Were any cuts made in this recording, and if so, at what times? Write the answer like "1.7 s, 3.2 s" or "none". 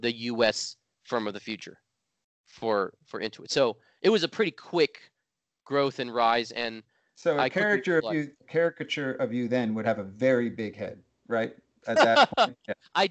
none